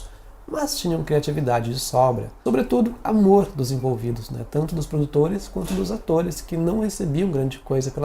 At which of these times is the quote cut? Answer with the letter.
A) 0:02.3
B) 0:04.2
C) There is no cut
A